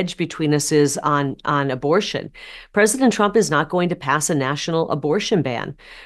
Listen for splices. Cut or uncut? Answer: uncut